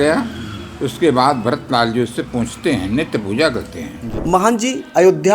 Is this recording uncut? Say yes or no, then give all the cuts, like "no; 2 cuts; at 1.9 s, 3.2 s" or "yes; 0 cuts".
no; 1 cut; at 4.1 s